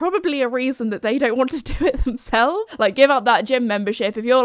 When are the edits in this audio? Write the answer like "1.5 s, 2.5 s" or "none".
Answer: 2.7 s